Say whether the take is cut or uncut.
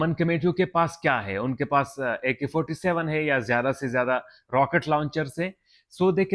uncut